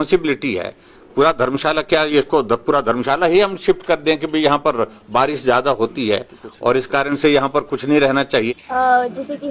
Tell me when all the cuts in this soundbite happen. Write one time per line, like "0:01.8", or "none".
0:08.5